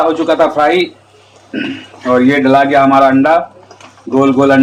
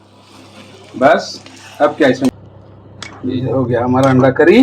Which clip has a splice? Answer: second; 1 cut; at 2.3 s

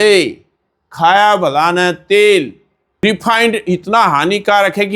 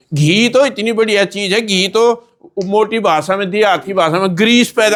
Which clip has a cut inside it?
first; 1 cut; at 3.0 s

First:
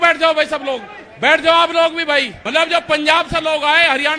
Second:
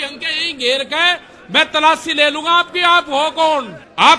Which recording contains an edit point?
first; 1 cut; at 2.4 s

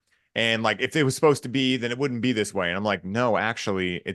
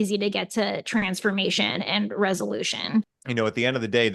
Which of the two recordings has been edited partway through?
second; 1 cut; at 3.2 s

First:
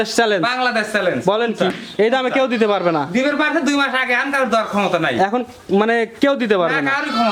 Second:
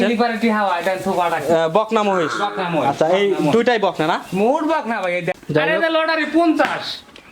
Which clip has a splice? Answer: second; 1 cut; at 5.4 s

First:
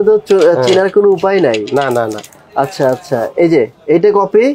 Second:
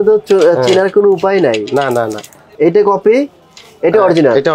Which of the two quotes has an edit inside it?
second; 1 cut; at 2.5 s

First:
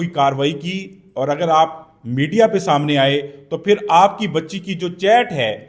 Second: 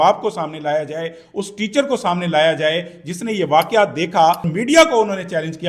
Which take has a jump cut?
second; 1 cut; at 4.5 s

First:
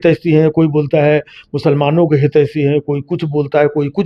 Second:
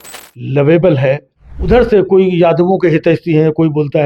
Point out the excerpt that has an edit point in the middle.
second; 1 cut; at 1.5 s

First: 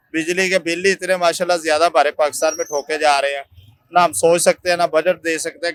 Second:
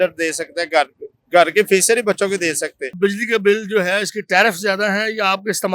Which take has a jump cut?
second; 1 cut; at 3.0 s

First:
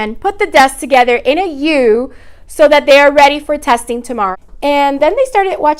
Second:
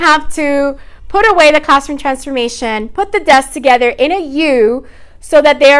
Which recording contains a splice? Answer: first; 1 cut; at 4.3 s

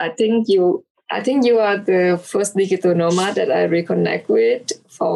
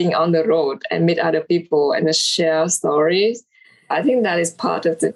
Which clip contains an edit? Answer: first; 1 cut; at 0.9 s

